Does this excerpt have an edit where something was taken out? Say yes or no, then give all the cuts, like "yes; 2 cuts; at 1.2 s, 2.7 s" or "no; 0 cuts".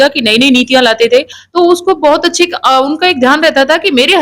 yes; 1 cut; at 1.4 s